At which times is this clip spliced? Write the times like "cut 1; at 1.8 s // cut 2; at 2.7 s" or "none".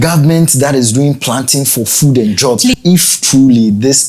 cut 1; at 2.8 s